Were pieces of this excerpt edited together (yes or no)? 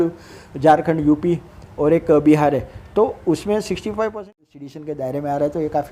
yes